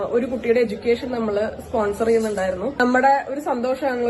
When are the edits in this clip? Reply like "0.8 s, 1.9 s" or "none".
2.7 s